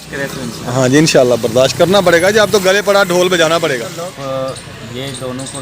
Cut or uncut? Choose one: cut